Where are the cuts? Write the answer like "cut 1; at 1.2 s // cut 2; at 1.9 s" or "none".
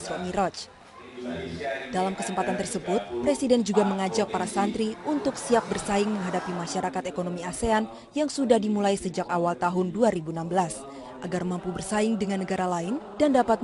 none